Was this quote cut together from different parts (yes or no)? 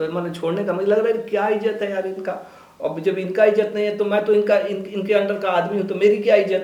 no